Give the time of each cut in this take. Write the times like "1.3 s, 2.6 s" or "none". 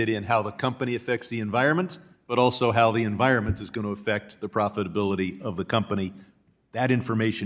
none